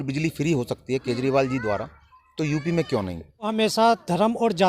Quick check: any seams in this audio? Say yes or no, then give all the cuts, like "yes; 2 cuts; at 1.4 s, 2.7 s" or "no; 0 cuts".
yes; 1 cut; at 3.5 s